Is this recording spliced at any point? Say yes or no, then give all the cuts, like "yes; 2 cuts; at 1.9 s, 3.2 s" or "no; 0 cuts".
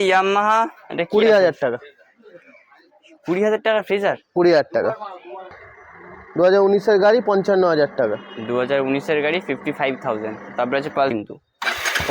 yes; 2 cuts; at 5.6 s, 11.1 s